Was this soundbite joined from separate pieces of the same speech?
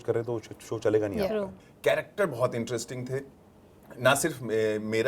yes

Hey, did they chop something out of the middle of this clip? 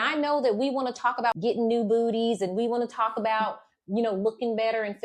yes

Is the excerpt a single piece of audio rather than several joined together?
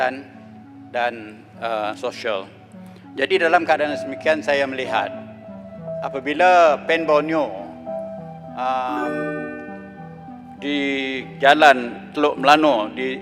yes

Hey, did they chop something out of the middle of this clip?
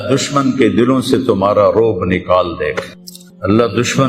no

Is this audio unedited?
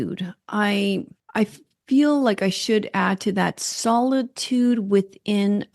no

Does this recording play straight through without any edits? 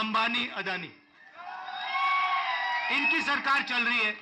yes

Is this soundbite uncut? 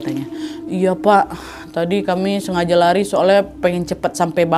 yes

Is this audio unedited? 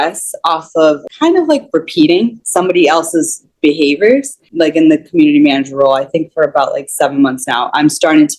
no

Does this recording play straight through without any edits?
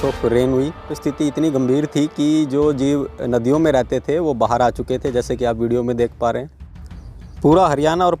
no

